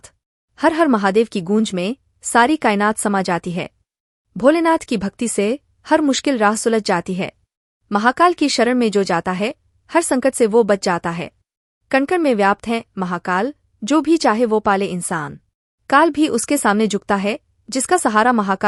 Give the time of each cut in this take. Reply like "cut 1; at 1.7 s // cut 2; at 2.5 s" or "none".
none